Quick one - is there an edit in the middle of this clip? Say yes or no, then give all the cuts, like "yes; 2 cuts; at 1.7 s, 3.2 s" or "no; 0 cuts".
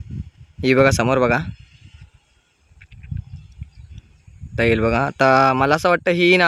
no; 0 cuts